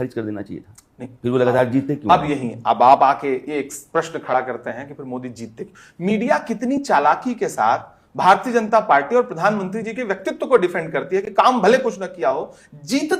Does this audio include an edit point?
no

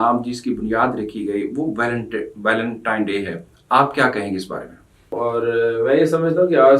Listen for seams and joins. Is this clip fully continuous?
no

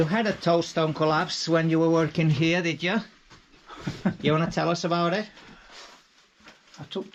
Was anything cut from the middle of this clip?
no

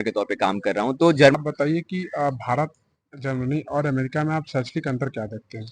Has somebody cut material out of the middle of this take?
yes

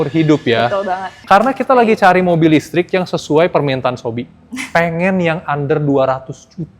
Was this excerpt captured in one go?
no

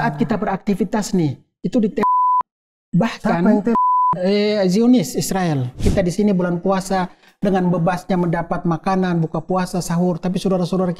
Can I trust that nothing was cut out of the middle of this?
no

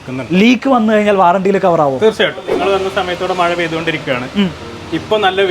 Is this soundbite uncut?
no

